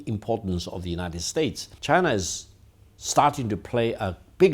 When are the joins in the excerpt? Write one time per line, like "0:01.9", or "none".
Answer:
0:01.7